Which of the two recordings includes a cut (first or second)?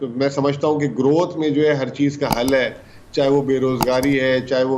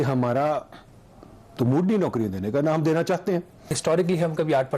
second